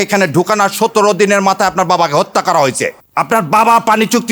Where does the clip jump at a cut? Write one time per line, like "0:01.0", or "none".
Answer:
0:03.0